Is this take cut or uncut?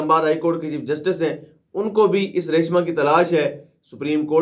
uncut